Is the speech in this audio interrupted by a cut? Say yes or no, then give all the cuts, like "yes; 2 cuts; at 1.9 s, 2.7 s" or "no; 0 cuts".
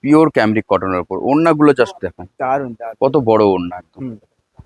no; 0 cuts